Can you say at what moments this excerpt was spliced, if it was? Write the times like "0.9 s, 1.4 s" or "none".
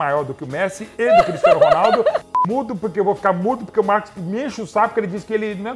2.3 s